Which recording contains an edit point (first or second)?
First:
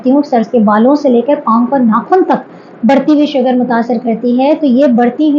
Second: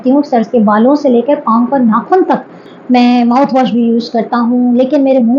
second